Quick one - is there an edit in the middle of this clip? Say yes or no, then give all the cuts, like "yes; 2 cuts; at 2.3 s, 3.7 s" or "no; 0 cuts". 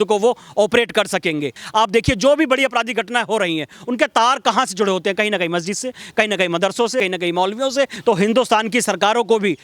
yes; 2 cuts; at 1.6 s, 7.9 s